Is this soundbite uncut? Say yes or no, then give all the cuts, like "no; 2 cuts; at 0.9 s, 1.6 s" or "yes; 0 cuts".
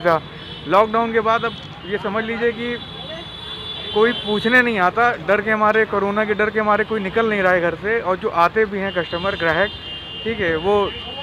yes; 0 cuts